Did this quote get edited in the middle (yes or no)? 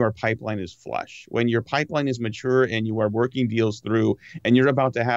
no